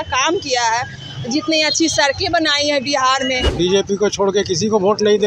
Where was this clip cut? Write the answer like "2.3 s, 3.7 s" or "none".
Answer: 3.4 s